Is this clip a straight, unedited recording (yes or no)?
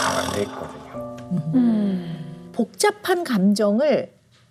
yes